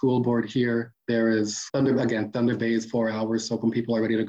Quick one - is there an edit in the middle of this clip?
yes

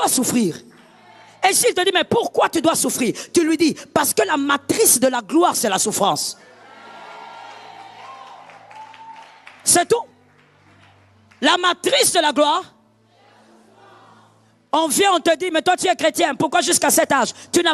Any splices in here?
yes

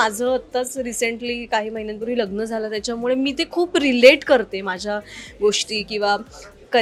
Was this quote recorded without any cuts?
yes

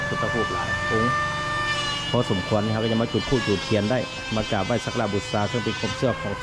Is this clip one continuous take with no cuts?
yes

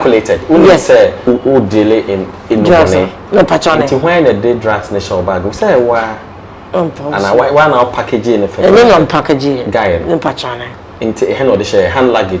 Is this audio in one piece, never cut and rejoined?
no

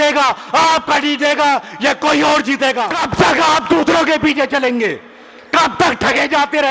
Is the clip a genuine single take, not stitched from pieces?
no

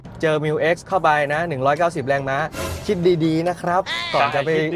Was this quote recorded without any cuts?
yes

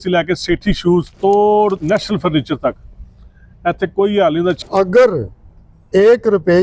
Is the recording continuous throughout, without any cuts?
no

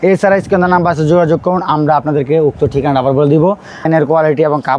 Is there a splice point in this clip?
yes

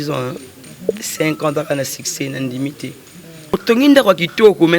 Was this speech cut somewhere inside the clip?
yes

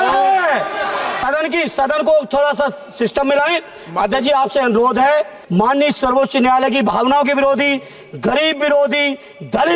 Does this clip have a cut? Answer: yes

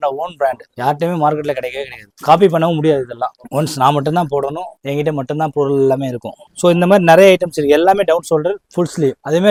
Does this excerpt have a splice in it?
no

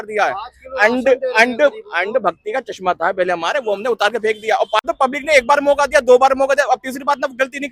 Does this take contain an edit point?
yes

